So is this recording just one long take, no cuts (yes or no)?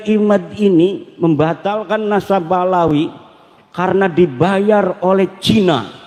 yes